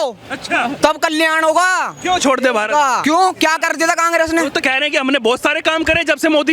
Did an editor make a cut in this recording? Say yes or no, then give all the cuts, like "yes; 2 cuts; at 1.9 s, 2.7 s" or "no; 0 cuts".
yes; 2 cuts; at 3.0 s, 4.6 s